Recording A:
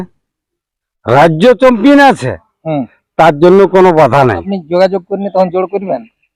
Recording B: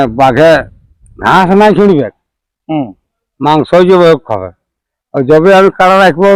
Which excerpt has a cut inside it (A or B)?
A